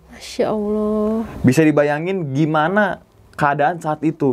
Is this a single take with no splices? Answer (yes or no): yes